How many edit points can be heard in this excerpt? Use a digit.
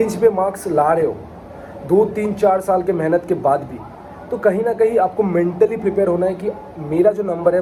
0